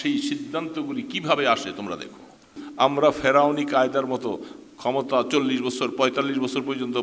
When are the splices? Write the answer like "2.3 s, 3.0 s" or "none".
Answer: 2.6 s